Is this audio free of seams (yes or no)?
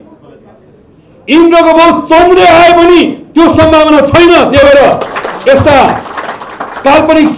yes